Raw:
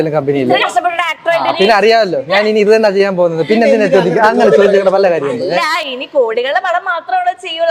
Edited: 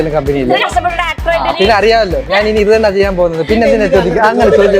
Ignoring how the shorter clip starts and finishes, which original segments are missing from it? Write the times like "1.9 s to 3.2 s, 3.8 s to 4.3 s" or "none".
none